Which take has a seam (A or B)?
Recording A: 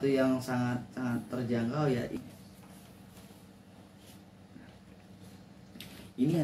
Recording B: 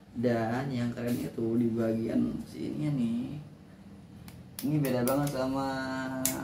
A